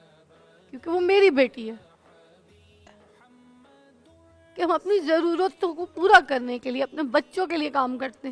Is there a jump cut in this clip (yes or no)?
yes